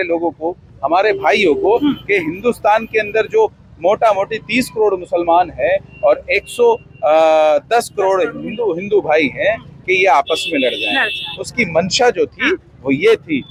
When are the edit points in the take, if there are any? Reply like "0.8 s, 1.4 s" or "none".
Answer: none